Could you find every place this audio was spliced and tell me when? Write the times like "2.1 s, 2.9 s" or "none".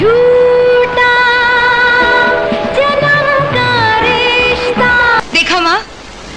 5.2 s